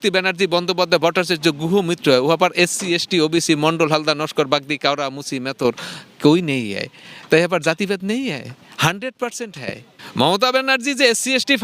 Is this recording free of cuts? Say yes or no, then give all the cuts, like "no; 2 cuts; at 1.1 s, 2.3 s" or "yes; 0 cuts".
no; 1 cut; at 9.9 s